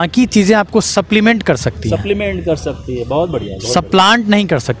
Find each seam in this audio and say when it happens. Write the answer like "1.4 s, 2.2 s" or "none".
none